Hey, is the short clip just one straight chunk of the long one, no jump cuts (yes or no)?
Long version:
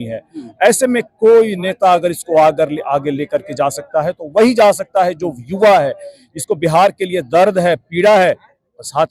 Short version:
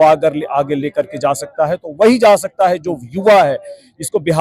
yes